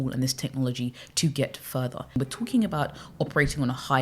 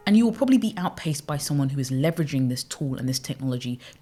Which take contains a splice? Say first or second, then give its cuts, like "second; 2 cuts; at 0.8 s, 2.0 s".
first; 1 cut; at 2.2 s